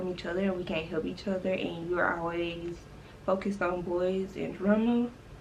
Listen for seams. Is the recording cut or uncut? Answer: uncut